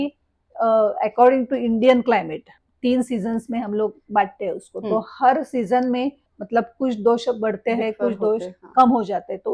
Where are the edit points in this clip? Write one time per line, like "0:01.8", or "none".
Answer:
0:02.6
0:06.3